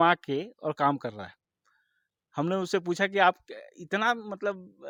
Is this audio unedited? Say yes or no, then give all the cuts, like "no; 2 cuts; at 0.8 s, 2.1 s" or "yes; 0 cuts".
yes; 0 cuts